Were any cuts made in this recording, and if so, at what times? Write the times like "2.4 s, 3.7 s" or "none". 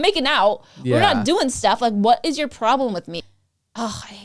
3.1 s